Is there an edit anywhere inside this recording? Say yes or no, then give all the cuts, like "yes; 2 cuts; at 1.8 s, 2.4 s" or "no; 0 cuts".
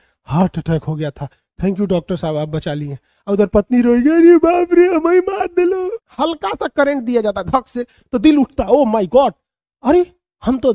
yes; 1 cut; at 6.0 s